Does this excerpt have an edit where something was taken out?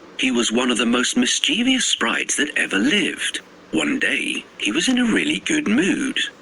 no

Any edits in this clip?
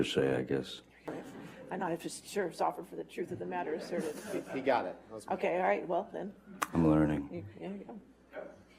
yes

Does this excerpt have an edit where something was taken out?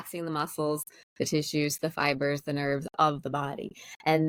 no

